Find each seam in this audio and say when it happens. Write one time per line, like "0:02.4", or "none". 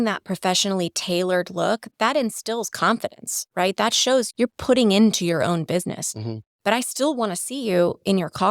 0:01.8
0:04.3